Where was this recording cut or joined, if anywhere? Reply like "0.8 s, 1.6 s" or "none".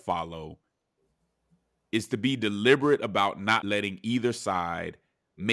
3.6 s